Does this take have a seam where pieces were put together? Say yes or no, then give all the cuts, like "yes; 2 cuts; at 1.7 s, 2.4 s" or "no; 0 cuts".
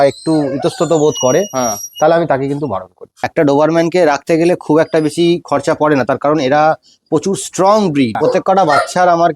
yes; 2 cuts; at 3.3 s, 8.2 s